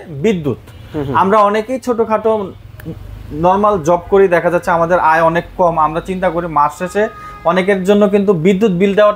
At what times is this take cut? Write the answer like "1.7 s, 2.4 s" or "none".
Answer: none

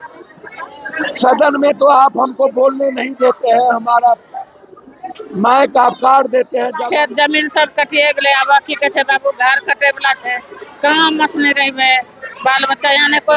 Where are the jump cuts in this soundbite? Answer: 6.8 s

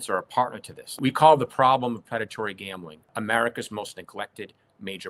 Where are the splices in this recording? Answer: 1.0 s, 3.0 s

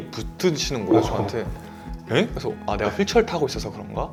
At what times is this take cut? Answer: none

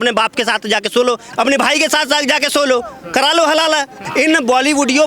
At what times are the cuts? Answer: 1.3 s, 4.0 s

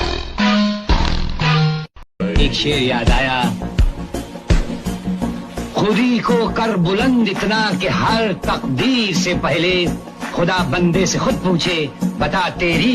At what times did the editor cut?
2.0 s

